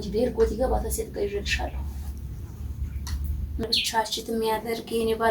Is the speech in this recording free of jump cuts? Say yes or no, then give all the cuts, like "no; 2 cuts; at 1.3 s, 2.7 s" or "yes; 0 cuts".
no; 1 cut; at 3.6 s